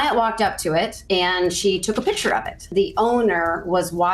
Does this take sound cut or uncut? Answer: cut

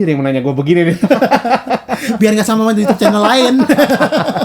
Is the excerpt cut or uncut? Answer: uncut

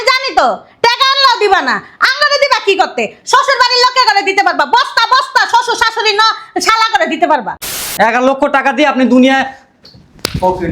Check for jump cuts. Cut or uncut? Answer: cut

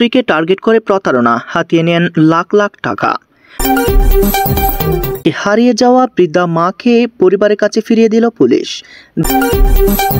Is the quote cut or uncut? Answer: cut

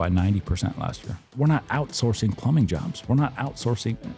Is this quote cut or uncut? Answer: cut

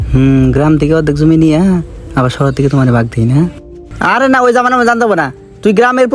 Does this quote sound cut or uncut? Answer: uncut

